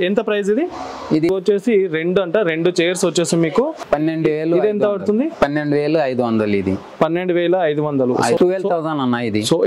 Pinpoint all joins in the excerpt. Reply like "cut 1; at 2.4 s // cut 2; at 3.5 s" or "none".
cut 1; at 1.3 s // cut 2; at 3.8 s // cut 3; at 8.4 s

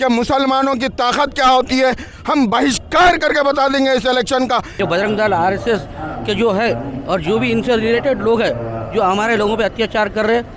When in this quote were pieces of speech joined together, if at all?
cut 1; at 4.7 s

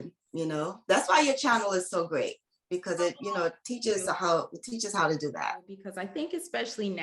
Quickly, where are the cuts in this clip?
cut 1; at 5.8 s

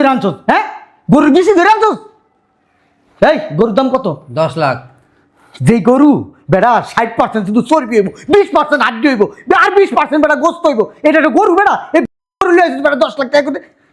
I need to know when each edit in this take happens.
none

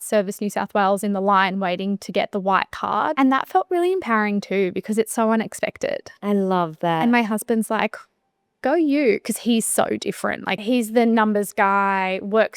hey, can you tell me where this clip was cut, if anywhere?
cut 1; at 3.1 s // cut 2; at 10.6 s

